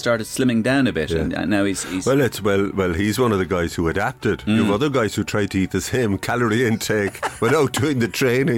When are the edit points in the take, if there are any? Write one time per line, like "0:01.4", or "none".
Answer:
none